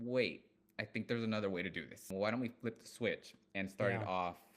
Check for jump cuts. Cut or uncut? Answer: cut